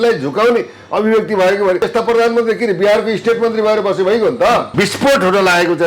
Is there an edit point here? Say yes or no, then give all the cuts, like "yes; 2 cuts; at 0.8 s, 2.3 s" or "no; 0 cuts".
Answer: yes; 2 cuts; at 1.9 s, 4.7 s